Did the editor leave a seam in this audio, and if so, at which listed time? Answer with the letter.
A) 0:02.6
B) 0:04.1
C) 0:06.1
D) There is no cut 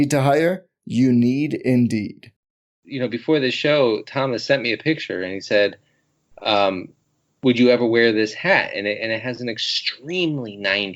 A